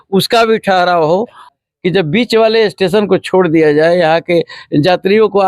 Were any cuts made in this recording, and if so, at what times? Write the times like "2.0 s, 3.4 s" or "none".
1.4 s